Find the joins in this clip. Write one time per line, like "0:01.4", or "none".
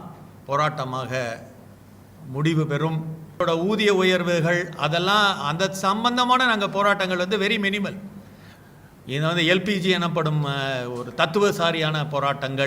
0:03.4